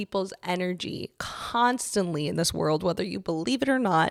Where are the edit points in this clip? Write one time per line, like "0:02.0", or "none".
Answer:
none